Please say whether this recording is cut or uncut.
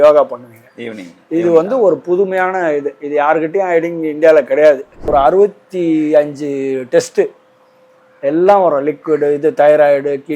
cut